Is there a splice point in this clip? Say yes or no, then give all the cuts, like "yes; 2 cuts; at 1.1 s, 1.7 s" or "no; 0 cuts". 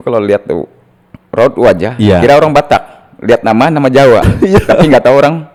no; 0 cuts